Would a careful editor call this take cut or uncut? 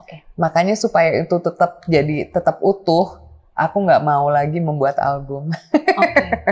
uncut